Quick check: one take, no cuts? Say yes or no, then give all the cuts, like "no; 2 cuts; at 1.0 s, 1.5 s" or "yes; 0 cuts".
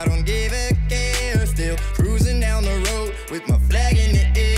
yes; 0 cuts